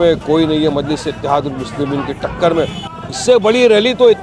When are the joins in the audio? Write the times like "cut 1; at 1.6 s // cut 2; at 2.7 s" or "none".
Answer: cut 1; at 2.9 s